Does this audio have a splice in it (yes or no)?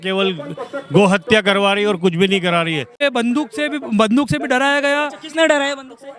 yes